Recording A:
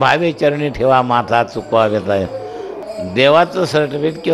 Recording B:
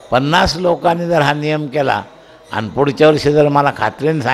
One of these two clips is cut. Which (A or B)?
A